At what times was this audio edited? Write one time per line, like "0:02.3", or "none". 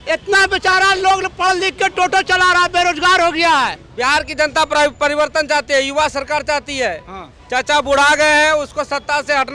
0:03.8